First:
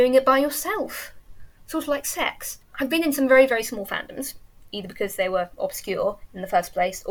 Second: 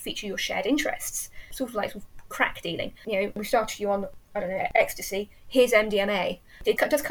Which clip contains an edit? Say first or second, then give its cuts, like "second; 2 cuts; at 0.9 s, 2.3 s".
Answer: first; 1 cut; at 2.7 s